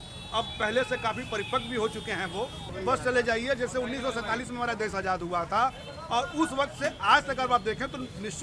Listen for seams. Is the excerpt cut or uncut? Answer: cut